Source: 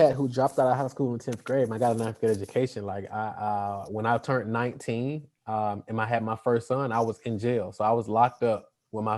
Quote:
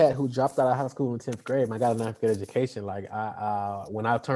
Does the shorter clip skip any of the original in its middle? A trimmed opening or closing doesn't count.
no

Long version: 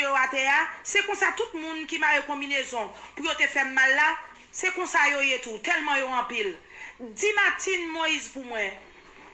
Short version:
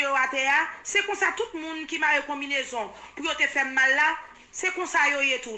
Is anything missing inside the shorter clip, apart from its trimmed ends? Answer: no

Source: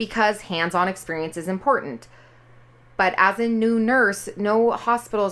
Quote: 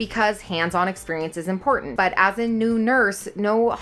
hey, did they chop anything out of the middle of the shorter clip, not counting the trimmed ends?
yes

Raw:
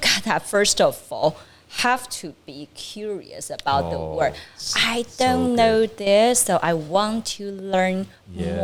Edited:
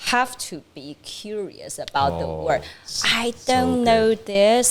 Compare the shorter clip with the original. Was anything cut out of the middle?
no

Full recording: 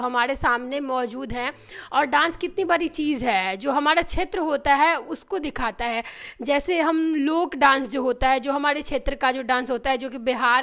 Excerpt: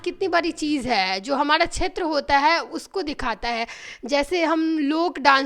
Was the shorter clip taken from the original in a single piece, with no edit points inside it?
yes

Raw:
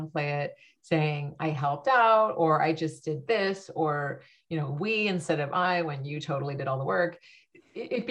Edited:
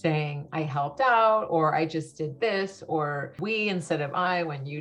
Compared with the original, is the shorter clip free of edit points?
no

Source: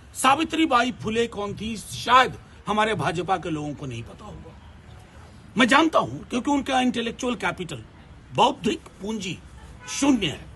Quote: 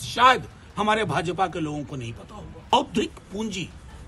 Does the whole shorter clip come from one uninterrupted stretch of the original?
no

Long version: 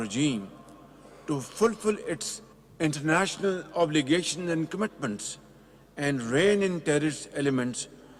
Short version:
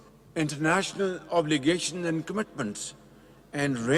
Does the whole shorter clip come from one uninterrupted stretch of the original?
yes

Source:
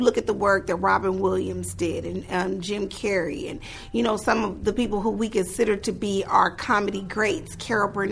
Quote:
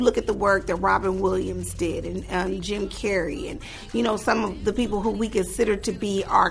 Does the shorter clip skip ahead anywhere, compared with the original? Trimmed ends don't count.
no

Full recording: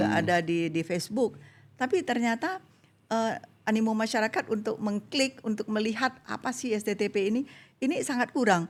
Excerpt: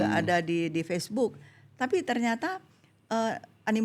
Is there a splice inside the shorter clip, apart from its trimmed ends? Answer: no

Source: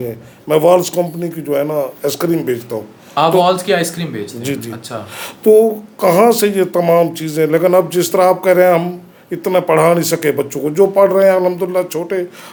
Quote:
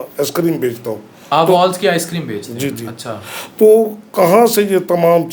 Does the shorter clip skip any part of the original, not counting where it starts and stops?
no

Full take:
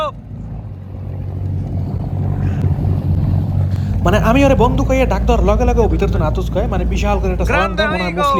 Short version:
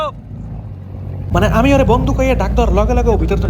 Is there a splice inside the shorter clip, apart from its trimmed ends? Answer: yes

